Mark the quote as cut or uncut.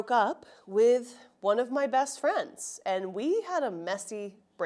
uncut